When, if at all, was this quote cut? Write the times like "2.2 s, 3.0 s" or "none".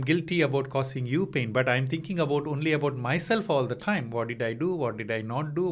none